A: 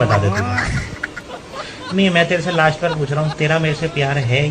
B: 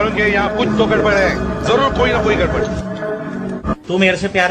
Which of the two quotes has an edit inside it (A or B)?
B